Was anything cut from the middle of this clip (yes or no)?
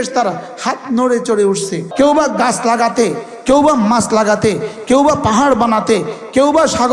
yes